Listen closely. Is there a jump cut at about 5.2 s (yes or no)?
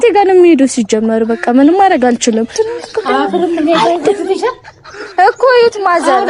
no